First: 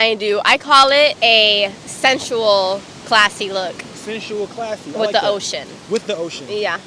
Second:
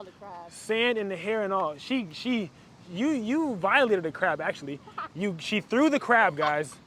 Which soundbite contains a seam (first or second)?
first